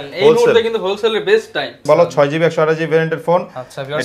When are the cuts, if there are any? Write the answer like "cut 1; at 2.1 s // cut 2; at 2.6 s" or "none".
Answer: cut 1; at 1.8 s